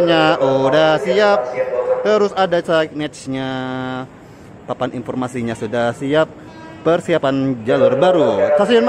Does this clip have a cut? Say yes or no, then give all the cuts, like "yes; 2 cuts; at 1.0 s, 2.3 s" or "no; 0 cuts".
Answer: no; 0 cuts